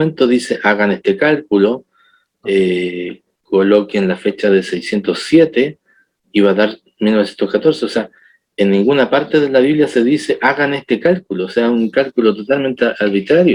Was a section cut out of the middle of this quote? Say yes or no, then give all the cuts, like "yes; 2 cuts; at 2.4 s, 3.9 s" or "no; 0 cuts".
no; 0 cuts